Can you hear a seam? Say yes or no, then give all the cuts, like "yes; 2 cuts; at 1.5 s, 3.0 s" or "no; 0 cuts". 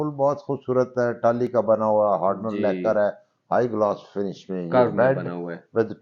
no; 0 cuts